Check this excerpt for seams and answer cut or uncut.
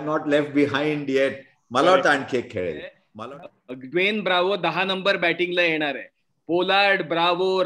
cut